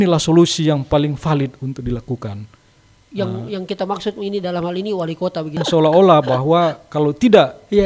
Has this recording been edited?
yes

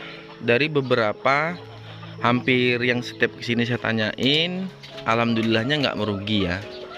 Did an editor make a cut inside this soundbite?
no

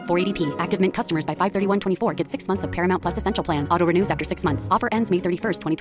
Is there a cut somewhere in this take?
no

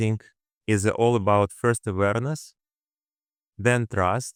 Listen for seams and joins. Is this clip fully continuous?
yes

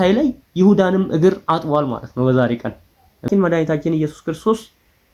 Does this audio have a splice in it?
yes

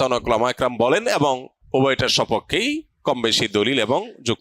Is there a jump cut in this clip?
yes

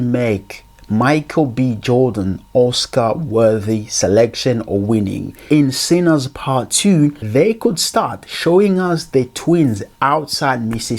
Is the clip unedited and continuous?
no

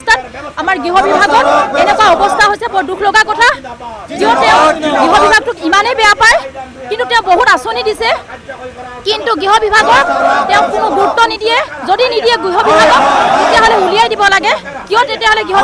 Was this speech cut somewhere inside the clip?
no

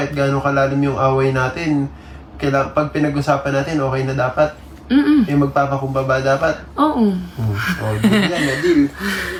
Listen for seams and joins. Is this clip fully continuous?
yes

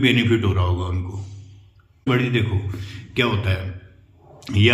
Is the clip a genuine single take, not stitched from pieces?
no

